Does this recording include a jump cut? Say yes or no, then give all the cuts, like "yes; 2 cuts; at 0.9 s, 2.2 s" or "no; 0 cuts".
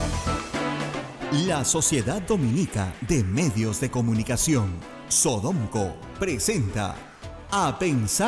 yes; 1 cut; at 1.1 s